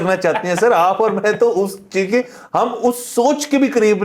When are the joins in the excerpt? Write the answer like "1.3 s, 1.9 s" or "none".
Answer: none

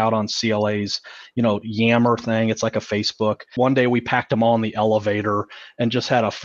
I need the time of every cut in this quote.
3.4 s

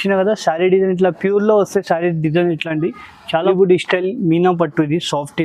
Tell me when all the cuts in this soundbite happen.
3.5 s

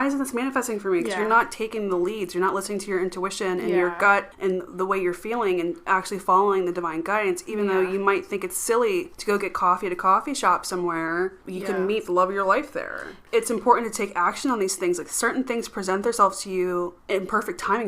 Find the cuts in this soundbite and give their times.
4.3 s, 9.1 s, 11.5 s, 13.2 s, 17.0 s

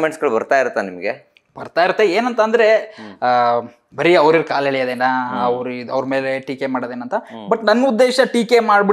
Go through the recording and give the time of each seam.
none

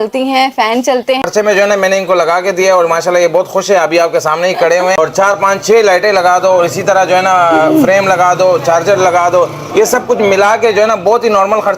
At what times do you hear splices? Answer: 1.3 s, 5.0 s

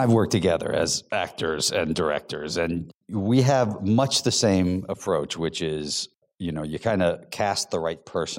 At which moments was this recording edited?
2.9 s, 6.1 s

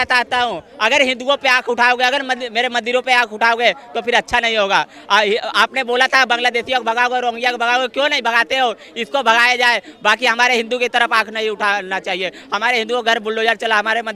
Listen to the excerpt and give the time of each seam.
none

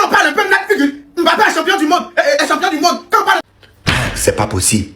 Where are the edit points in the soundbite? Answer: 3.4 s

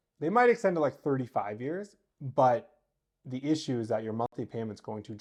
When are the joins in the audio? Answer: none

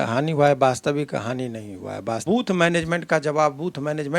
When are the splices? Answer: 2.2 s

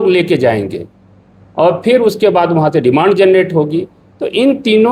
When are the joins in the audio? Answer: none

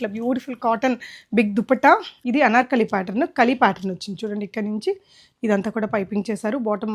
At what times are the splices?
2.1 s

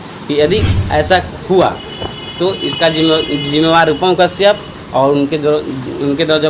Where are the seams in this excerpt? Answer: none

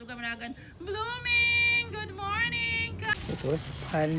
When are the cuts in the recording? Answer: 3.1 s

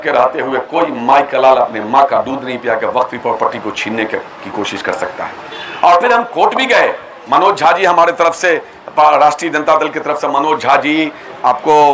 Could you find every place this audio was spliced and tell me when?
none

